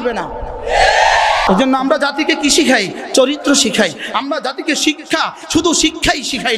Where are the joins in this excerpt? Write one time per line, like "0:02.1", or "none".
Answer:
0:01.4